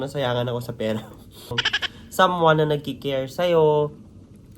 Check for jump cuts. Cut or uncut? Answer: cut